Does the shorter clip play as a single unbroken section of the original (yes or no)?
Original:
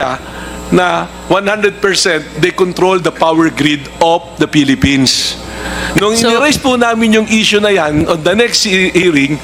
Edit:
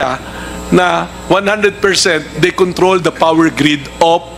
yes